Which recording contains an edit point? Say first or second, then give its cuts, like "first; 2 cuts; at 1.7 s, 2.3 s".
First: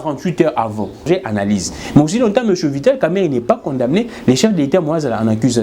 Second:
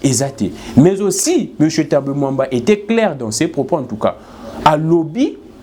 first; 1 cut; at 1.0 s